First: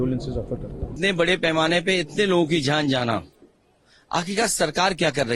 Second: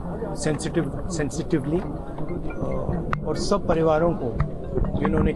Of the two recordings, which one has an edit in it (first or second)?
first